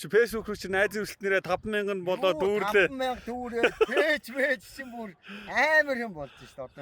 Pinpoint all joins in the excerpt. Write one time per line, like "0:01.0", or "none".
none

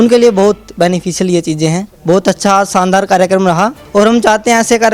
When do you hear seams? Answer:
0:01.9
0:03.8

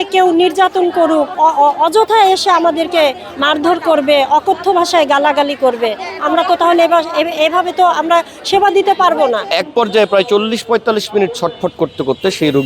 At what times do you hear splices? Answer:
0:01.3
0:09.5

